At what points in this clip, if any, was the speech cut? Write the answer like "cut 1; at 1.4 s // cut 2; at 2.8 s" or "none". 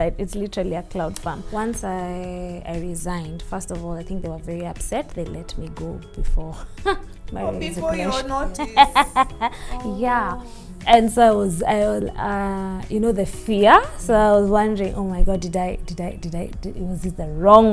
cut 1; at 1.4 s